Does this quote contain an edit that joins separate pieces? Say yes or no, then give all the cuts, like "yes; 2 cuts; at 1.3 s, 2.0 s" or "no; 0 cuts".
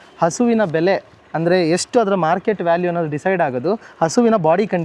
no; 0 cuts